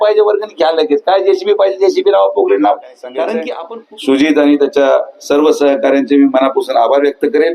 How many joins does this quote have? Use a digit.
1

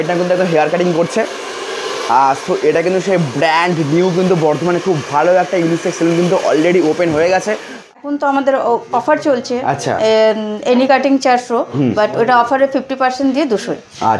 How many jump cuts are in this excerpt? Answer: 1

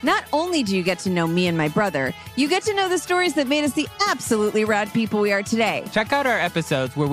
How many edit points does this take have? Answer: 1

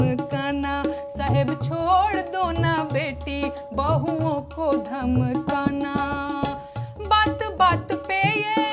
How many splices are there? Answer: 0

